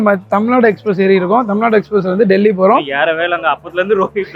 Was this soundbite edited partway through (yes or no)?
no